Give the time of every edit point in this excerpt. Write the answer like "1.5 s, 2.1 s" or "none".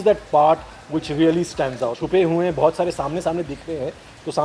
2.0 s